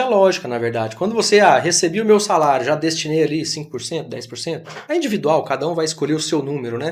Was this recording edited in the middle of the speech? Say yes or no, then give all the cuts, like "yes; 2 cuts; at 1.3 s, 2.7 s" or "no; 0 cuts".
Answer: no; 0 cuts